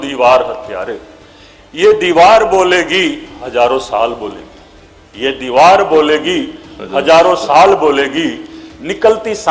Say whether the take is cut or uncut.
uncut